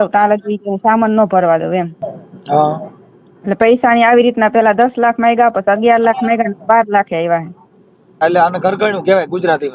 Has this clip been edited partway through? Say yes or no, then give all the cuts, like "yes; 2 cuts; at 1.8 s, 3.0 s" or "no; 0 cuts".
yes; 1 cut; at 8.2 s